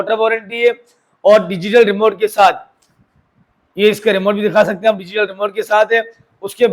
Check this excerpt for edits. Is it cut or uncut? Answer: uncut